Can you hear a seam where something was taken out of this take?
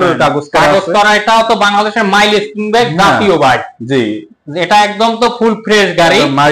no; 0 cuts

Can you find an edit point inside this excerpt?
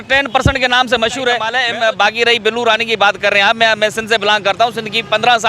yes; 1 cut; at 1.5 s

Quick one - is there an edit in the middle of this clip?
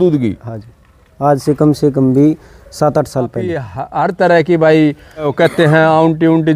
yes; 2 cuts; at 3.8 s, 5.3 s

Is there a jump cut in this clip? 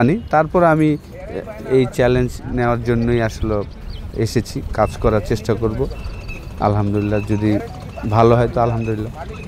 no; 0 cuts

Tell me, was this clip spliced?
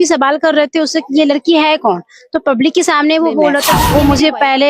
yes; 1 cut; at 3.7 s

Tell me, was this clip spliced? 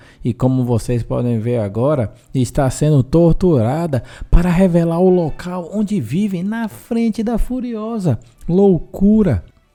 no; 0 cuts

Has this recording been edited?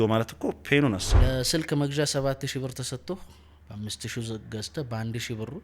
yes; 1 cut; at 1.2 s

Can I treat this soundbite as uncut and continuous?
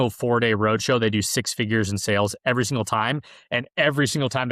yes; 0 cuts

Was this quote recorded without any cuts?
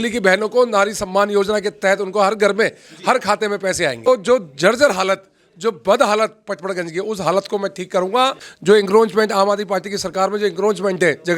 no; 2 cuts; at 4.1 s, 8.5 s

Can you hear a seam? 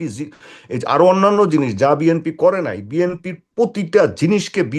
no; 0 cuts

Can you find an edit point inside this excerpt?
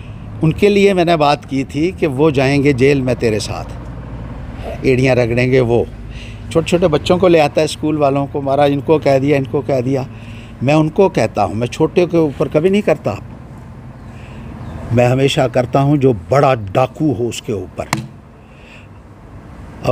no; 0 cuts

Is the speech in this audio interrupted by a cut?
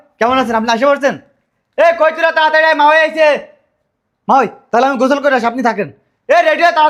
no; 0 cuts

